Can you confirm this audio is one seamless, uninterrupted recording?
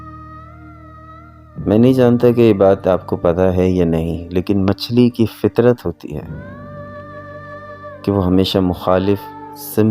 no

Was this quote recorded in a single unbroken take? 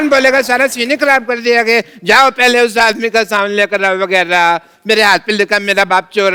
yes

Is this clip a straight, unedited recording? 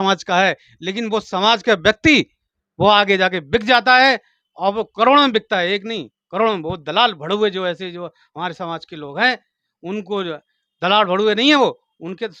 yes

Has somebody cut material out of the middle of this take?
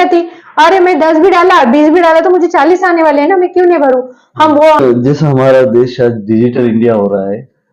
yes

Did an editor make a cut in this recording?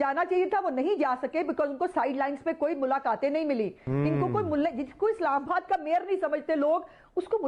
no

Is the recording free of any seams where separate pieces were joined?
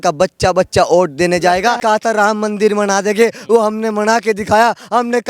no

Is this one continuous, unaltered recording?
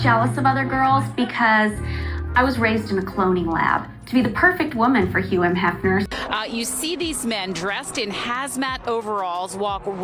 no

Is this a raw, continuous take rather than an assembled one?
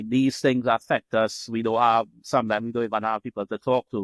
yes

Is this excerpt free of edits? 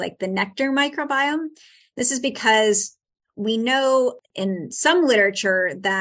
no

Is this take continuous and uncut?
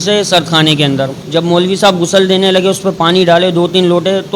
no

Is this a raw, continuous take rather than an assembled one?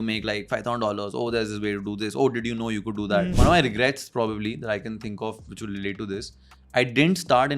no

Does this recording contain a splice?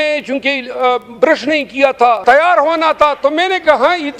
yes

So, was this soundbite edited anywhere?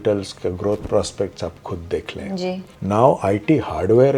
yes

